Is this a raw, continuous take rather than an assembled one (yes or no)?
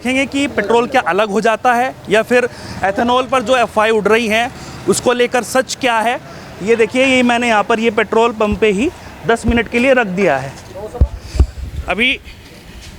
yes